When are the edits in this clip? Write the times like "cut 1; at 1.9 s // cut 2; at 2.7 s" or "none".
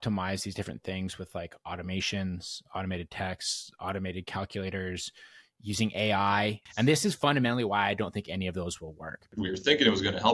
cut 1; at 6.6 s // cut 2; at 9.3 s

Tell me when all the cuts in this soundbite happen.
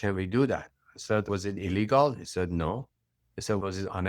cut 1; at 1.3 s

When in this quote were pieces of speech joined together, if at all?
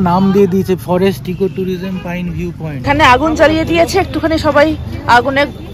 cut 1; at 2.8 s

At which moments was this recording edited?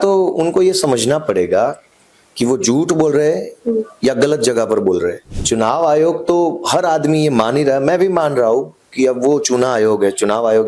cut 1; at 5.3 s

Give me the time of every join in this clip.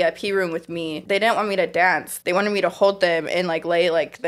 cut 1; at 1.0 s // cut 2; at 2.1 s

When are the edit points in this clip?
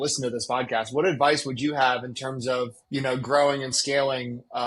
cut 1; at 2.8 s

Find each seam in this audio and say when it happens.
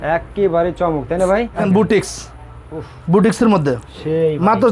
cut 1; at 1.6 s

